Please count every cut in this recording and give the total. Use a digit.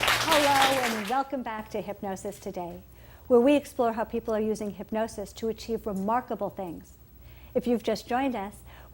1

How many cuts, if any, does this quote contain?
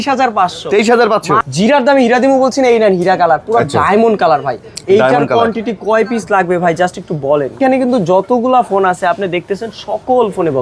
2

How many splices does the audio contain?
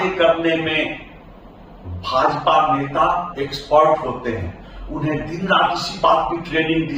0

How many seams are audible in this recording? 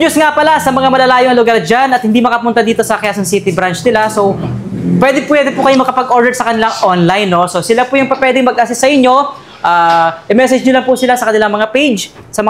0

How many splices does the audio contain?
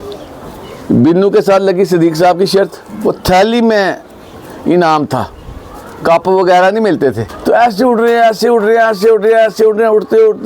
1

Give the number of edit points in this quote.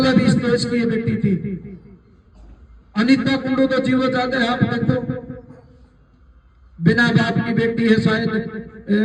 0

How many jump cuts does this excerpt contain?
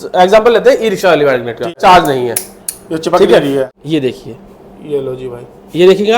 2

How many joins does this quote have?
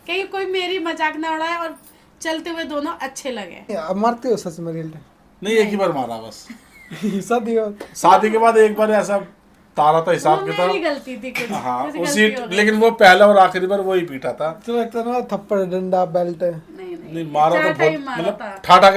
1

